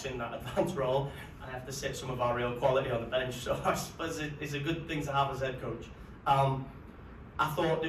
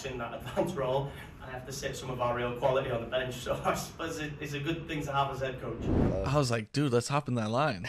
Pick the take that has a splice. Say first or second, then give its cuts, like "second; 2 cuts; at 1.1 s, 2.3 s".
second; 1 cut; at 6.0 s